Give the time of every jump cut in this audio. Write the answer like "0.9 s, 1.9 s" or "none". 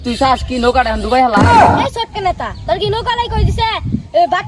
1.4 s, 2.0 s